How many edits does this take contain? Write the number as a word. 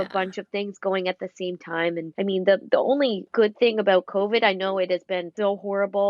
three